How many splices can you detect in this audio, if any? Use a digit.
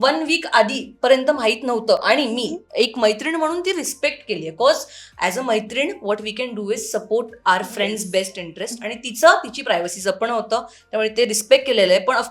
0